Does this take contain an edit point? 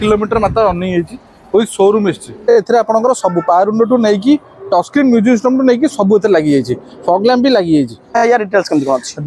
yes; 2 cuts; at 2.5 s, 8.2 s

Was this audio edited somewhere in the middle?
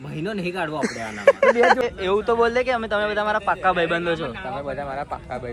yes; 1 cut; at 1.8 s

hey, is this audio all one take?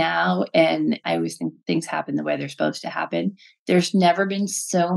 no; 1 cut; at 1.0 s

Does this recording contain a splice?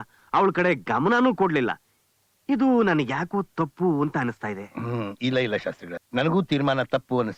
yes; 1 cut; at 5.9 s

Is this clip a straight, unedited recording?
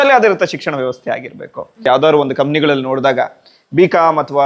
no; 1 cut; at 1.9 s

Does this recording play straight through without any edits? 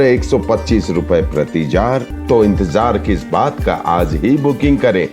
no; 1 cut; at 2.1 s

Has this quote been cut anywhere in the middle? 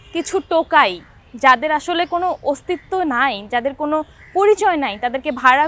no; 0 cuts

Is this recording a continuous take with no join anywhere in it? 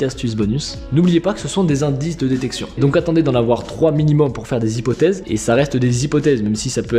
yes; 0 cuts

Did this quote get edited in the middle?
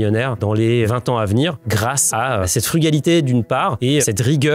no; 0 cuts

